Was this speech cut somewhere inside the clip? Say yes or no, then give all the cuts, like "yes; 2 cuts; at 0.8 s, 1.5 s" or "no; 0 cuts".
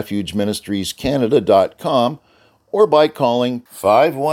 no; 0 cuts